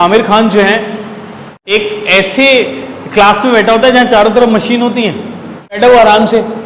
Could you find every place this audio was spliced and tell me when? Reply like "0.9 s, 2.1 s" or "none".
1.5 s, 5.8 s